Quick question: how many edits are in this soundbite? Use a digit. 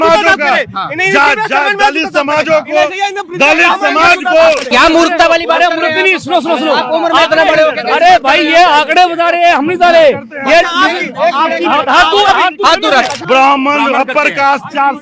2